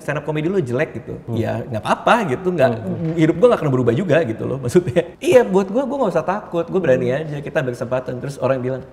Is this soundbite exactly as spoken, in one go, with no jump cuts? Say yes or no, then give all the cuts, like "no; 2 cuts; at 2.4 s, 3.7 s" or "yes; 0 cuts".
no; 2 cuts; at 1.2 s, 5.1 s